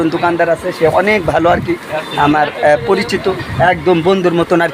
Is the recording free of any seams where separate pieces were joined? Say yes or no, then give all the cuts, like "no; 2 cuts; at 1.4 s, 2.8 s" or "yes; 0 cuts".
yes; 0 cuts